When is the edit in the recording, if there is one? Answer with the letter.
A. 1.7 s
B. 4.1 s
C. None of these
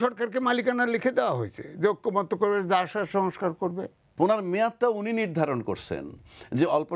B